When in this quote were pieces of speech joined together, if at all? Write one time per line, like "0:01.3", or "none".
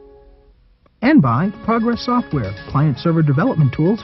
0:01.0